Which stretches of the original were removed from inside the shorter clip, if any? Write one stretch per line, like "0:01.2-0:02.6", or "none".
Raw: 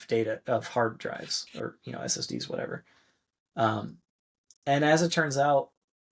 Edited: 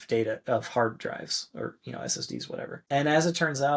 0:02.8-0:04.5